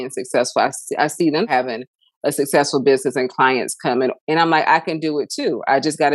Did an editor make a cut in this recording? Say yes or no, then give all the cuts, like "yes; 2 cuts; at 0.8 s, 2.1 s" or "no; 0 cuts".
yes; 2 cuts; at 1.5 s, 4.2 s